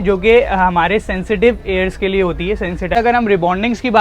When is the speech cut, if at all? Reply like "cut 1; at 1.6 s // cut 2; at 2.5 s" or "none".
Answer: cut 1; at 2.9 s